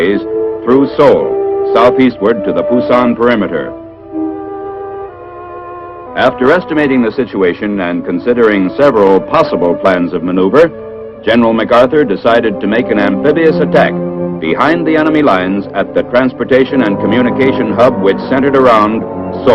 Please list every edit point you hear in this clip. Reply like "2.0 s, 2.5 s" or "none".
14.0 s